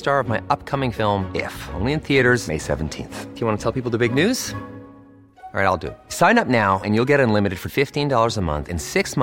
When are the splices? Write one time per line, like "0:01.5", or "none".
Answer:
none

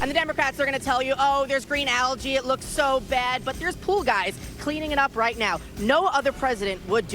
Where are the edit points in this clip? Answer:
0:03.4

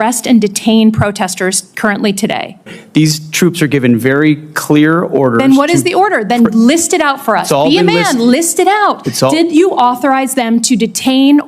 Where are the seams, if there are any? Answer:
0:02.8

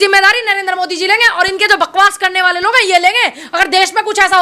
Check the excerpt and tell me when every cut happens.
none

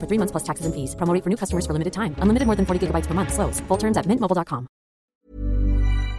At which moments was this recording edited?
0:05.1

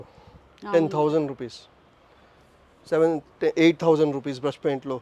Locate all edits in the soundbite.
none

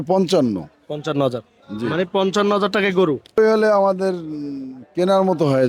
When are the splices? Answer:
0:03.4

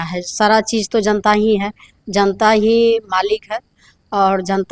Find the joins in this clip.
none

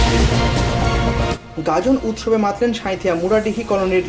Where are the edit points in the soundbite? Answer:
0:01.5

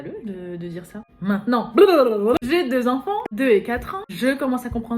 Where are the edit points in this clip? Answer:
0:01.1
0:02.4
0:03.3
0:04.0

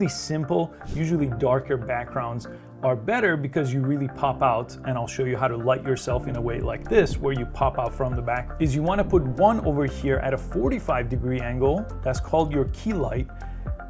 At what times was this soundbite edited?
0:08.5

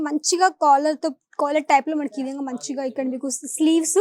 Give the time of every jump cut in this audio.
none

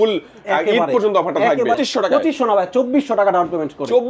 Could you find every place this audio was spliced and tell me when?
0:01.8

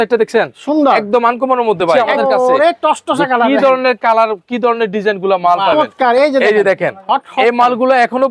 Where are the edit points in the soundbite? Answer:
0:02.1
0:05.8

